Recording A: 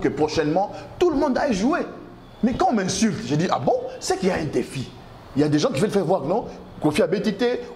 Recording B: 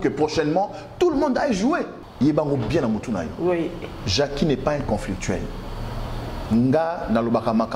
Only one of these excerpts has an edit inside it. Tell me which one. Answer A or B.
B